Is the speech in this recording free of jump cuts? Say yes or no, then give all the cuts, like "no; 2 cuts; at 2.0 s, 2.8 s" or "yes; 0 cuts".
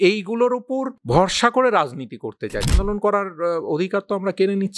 no; 2 cuts; at 0.9 s, 2.7 s